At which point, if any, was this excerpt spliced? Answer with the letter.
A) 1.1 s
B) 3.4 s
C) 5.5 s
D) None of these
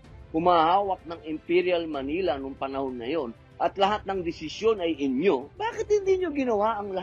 C